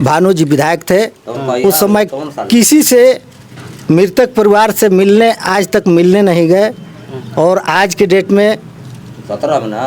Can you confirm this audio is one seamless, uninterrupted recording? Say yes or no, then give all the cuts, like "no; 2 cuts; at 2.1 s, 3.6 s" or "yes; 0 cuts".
yes; 0 cuts